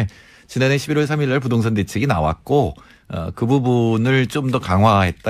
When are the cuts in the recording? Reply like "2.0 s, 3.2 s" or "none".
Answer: 3.0 s